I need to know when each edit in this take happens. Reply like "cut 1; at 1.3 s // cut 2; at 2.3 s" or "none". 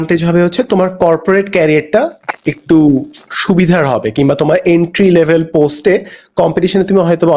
none